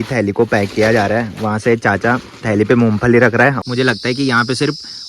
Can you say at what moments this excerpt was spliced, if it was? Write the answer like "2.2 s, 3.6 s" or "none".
3.6 s

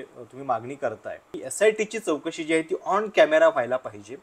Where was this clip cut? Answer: 1.4 s

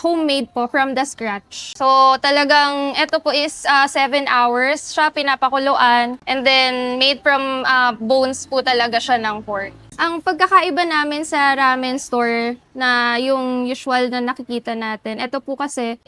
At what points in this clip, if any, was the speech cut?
none

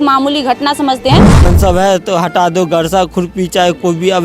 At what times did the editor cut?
1.4 s

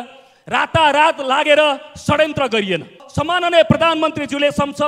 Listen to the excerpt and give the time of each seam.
3.0 s

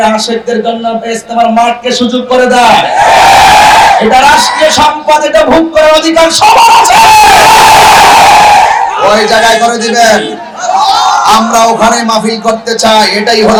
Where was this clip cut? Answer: none

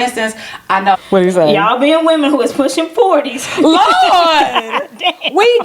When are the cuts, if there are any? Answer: 1.0 s

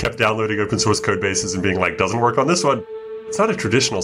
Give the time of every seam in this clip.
3.0 s

